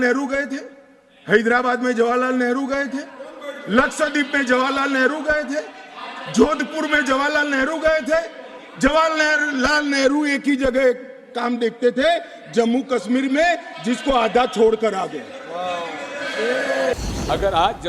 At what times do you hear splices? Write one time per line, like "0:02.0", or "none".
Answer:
0:16.9